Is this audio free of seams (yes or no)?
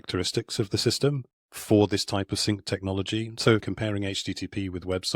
no